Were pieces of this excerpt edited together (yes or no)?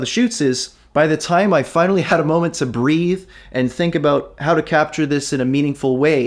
no